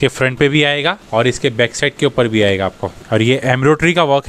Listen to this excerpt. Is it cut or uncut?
cut